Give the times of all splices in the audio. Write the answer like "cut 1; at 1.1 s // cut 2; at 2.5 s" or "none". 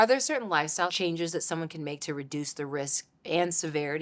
cut 1; at 0.9 s